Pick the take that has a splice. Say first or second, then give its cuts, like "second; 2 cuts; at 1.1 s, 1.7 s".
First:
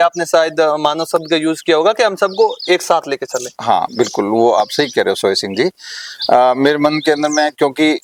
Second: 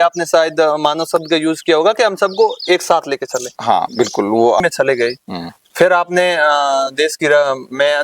second; 1 cut; at 4.6 s